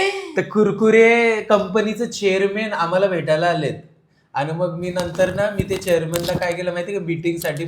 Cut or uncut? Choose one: uncut